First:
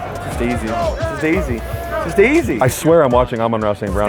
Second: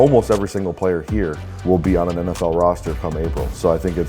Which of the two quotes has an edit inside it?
second; 1 cut; at 1.5 s

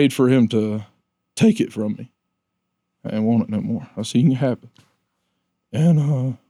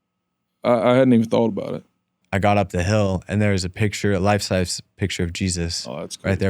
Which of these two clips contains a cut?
second; 1 cut; at 2.2 s

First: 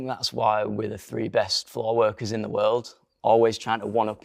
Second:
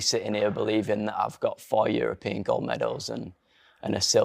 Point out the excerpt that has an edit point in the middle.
first; 1 cut; at 3.0 s

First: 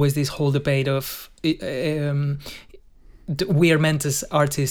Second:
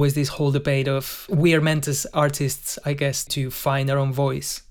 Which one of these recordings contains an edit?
second; 2 cuts; at 1.3 s, 3.3 s

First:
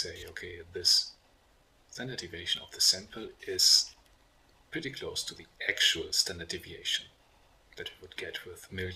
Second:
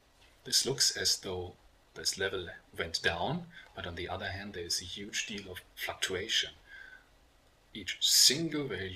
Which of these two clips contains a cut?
second; 1 cut; at 4.3 s

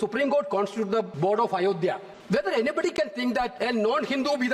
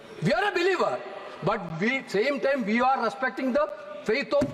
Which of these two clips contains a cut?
first; 3 cuts; at 1.1 s, 2.1 s, 3.5 s

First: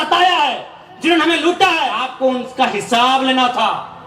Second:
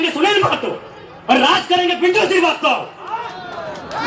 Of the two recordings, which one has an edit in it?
first; 1 cut; at 2.0 s

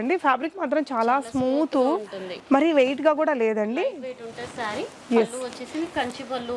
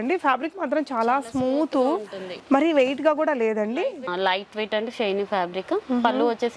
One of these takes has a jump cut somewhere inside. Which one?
second; 1 cut; at 4.1 s

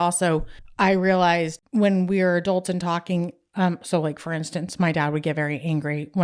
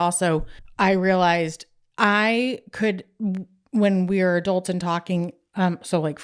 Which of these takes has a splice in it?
first; 1 cut; at 1.6 s

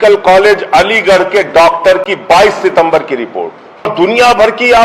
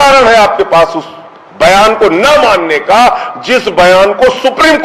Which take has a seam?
first; 1 cut; at 3.9 s

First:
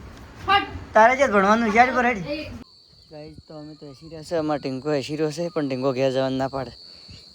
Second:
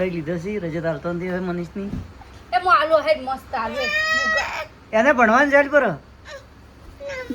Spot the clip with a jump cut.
first; 1 cut; at 2.6 s

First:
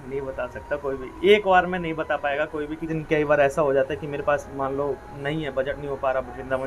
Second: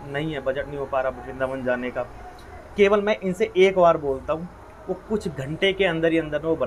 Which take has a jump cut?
first; 1 cut; at 2.9 s

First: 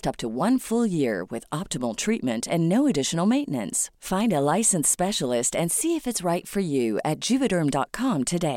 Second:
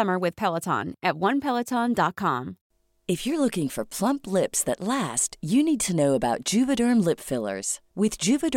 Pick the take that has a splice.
second; 1 cut; at 2.6 s

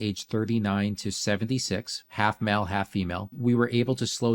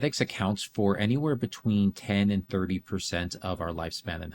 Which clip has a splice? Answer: first; 2 cuts; at 2.0 s, 3.3 s

